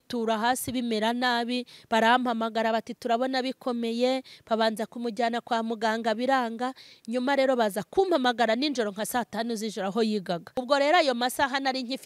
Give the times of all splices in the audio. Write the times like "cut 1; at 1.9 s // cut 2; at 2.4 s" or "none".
cut 1; at 10.5 s